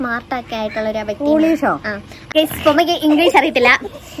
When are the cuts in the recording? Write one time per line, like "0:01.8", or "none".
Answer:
0:02.3